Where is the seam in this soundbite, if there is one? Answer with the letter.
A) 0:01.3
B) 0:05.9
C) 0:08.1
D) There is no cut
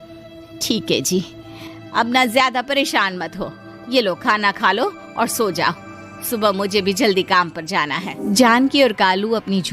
C